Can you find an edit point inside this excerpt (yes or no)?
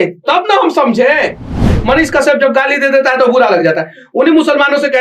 yes